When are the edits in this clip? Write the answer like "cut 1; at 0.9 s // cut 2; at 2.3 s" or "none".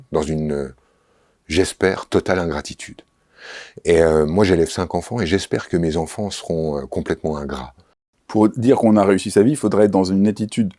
cut 1; at 8.0 s